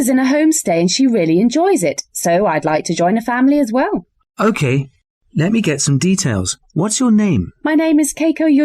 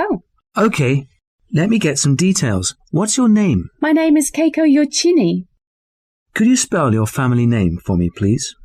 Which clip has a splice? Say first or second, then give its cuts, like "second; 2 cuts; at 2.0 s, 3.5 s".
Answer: first; 1 cut; at 0.9 s